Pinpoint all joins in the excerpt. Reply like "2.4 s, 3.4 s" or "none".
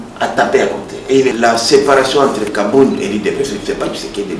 1.3 s